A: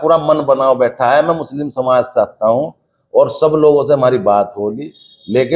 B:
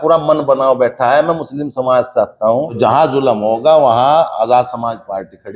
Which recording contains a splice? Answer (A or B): B